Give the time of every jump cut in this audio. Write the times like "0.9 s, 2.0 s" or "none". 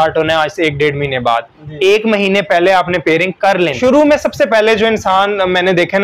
3.7 s